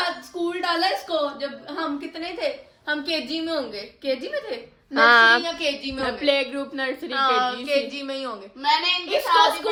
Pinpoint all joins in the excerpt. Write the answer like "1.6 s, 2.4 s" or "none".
none